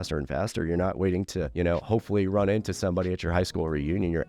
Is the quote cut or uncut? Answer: cut